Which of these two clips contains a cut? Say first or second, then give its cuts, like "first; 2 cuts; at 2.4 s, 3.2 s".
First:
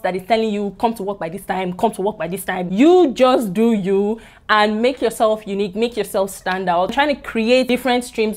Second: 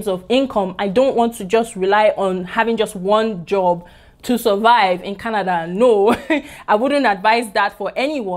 first; 2 cuts; at 2.6 s, 6.9 s